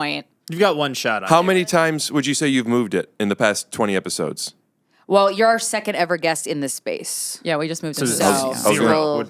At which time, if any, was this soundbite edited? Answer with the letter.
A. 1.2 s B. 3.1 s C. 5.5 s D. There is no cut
A